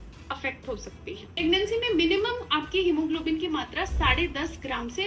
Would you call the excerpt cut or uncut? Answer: cut